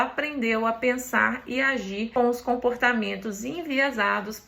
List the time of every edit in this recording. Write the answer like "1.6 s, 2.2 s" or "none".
2.1 s

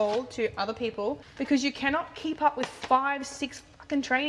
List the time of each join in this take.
1.3 s

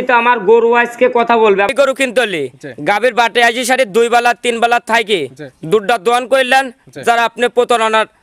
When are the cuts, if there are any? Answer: 1.7 s

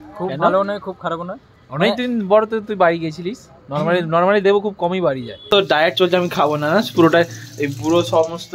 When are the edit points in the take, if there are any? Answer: 5.4 s

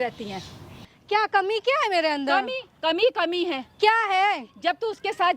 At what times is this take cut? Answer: 0.9 s

